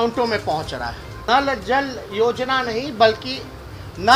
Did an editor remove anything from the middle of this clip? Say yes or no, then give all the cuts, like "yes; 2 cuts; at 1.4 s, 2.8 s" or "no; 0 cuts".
yes; 1 cut; at 1.1 s